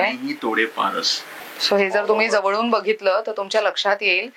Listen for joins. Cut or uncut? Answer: cut